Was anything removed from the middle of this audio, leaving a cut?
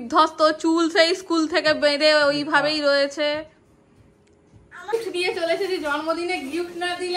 yes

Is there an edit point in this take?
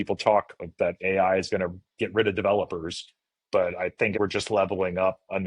yes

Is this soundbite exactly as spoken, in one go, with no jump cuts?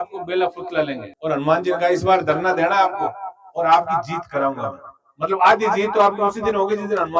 no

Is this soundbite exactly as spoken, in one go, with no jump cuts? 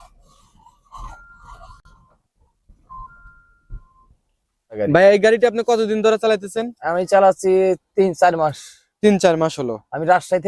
no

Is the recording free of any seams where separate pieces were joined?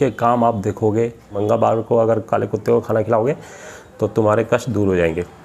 no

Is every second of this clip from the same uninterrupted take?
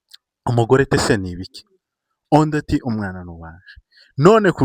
yes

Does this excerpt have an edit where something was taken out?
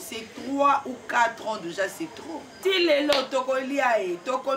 yes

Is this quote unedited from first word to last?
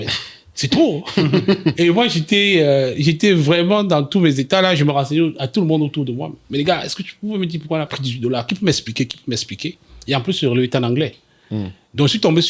no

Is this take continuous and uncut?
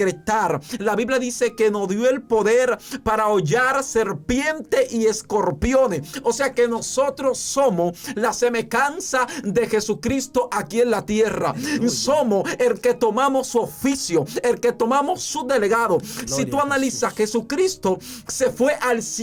yes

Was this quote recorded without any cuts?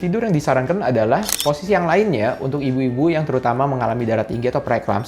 no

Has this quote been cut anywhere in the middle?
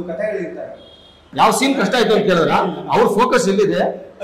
yes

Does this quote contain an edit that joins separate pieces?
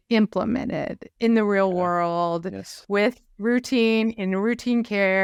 no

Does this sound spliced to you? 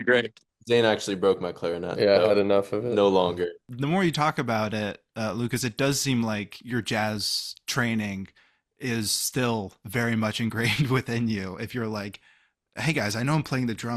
yes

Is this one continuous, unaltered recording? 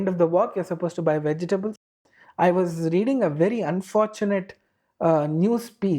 no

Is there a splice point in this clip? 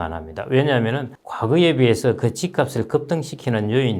no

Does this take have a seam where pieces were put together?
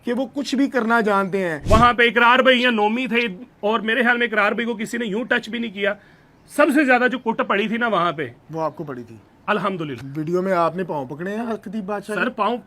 yes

